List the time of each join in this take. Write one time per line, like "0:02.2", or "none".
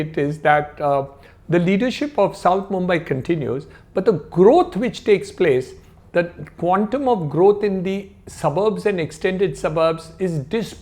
none

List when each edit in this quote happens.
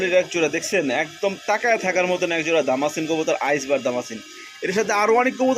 none

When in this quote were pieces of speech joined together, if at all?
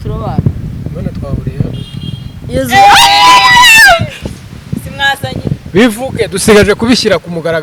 none

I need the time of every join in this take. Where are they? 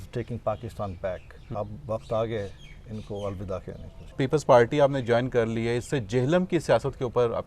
0:01.4
0:04.1

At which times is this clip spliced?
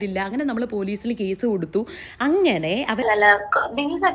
0:03.0

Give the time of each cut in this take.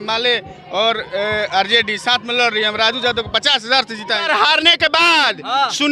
0:04.2

